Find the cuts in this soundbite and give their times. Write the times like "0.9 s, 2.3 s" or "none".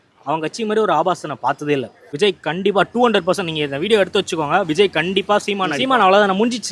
2.0 s, 5.6 s